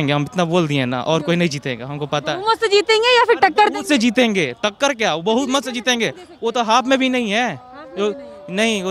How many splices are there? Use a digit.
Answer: 0